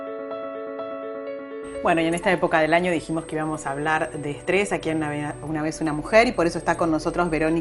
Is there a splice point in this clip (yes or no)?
no